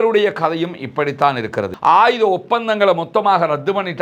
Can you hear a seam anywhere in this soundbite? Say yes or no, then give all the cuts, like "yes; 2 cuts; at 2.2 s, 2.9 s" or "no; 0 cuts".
yes; 1 cut; at 1.7 s